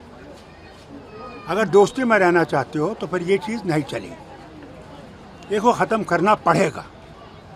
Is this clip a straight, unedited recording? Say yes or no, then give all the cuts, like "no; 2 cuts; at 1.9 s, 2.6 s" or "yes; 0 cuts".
yes; 0 cuts